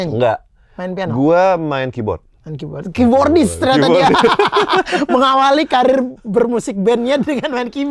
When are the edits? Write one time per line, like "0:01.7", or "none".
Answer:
none